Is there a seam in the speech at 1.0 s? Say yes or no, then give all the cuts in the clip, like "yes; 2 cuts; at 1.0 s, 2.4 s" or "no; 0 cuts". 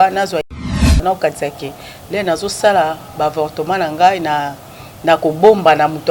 yes; 1 cut; at 1.0 s